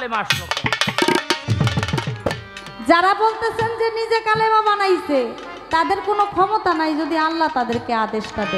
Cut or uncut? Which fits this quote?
cut